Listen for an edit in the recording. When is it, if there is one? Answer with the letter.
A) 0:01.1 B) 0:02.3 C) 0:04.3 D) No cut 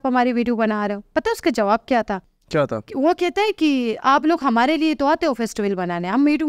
B